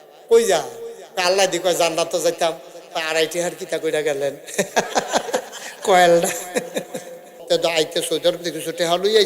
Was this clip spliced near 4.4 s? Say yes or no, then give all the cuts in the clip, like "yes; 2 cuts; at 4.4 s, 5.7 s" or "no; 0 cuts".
no; 1 cut; at 7.3 s